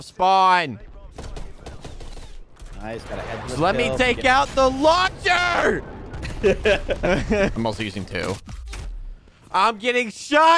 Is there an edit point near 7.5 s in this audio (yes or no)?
yes